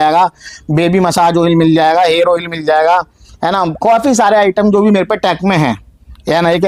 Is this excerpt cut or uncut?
uncut